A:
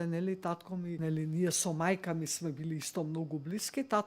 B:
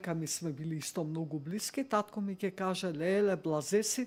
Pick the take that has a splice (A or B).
A